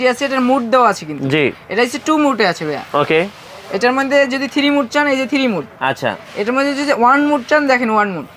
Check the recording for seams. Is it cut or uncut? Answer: uncut